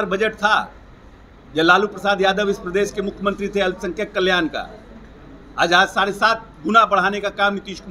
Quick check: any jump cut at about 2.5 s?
no; 0 cuts

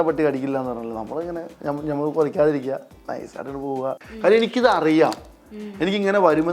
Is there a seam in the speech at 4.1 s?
yes; 1 cut; at 4.1 s

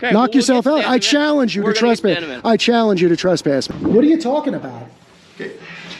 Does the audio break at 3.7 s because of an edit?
yes; 1 cut; at 3.7 s

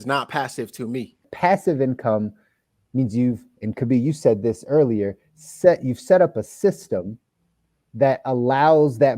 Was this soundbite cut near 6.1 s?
no; 1 cut; at 1.3 s

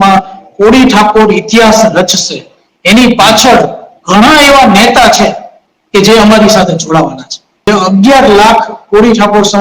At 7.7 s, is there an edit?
yes; 1 cut; at 7.7 s

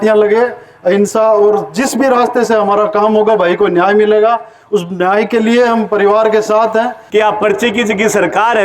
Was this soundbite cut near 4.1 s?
no; 1 cut; at 7.0 s

